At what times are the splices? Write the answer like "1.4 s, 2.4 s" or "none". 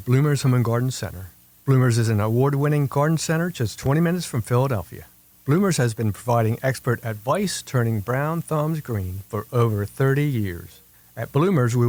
none